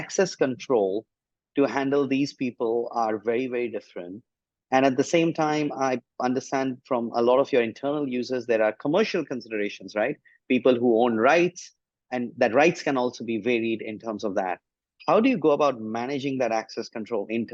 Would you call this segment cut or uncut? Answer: uncut